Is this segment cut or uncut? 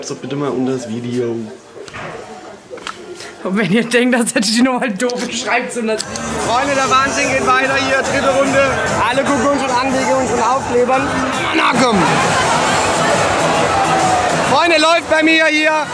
cut